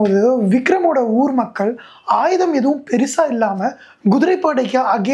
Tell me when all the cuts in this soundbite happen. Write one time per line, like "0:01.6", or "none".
none